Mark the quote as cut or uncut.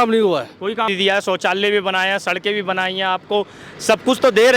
cut